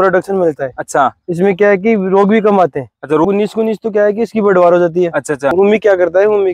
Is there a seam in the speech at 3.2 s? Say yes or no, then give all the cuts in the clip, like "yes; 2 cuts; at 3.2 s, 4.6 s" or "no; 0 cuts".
yes; 2 cuts; at 3.2 s, 5.5 s